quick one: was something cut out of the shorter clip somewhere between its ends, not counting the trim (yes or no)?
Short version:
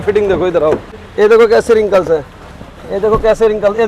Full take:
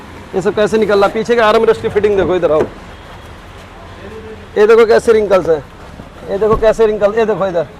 yes